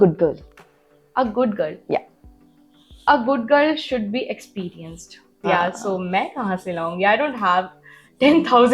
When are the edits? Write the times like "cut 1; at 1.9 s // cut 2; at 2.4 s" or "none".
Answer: cut 1; at 5.2 s